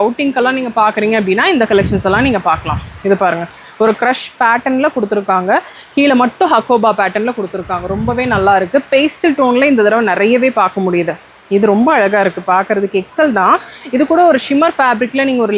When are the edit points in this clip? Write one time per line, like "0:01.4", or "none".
none